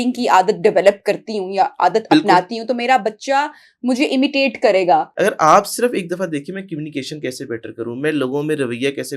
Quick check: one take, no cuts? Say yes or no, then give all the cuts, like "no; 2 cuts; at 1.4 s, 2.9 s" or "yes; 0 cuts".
no; 1 cut; at 5.1 s